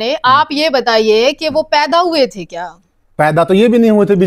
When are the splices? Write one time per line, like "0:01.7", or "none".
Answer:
none